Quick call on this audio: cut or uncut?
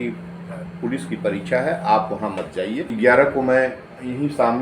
cut